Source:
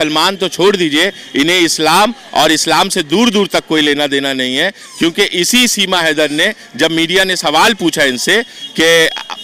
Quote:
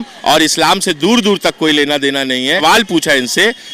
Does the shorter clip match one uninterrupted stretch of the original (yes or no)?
no